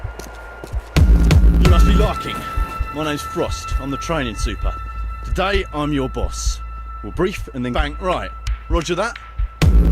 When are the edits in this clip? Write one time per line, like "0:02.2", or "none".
none